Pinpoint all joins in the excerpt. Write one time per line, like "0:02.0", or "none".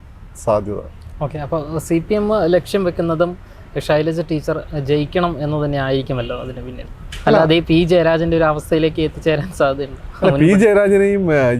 none